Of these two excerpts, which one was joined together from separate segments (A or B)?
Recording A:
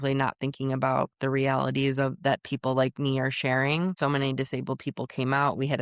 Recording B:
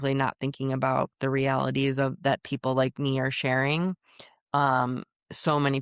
A